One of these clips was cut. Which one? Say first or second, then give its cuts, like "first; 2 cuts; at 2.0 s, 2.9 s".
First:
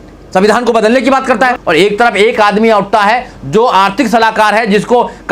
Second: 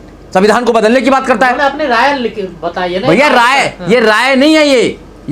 first; 1 cut; at 1.6 s